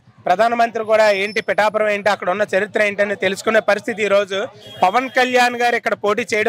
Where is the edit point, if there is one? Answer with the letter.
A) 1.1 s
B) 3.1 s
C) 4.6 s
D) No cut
D